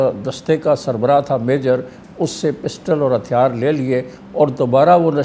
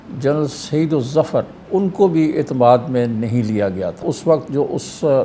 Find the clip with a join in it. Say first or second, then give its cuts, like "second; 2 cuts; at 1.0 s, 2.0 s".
second; 2 cuts; at 1.6 s, 4.0 s